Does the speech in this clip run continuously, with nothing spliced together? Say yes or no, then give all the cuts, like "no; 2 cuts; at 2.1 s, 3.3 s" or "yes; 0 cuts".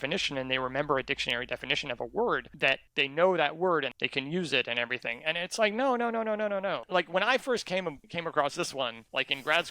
no; 3 cuts; at 2.9 s, 3.9 s, 6.8 s